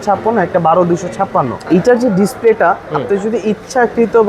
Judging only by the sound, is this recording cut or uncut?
cut